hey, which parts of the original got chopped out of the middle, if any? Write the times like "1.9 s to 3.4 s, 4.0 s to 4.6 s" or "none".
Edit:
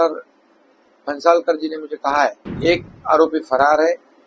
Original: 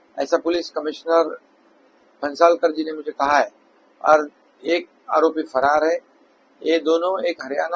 3.6 s to 4.5 s